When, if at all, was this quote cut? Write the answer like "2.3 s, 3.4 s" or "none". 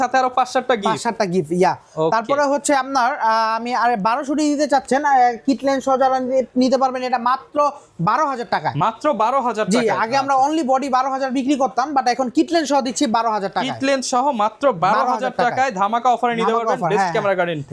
none